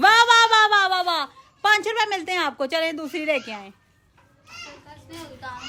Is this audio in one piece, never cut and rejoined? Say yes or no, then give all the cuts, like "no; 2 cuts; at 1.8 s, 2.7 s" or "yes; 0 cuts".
yes; 0 cuts